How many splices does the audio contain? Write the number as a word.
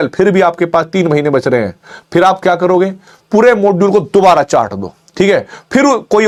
zero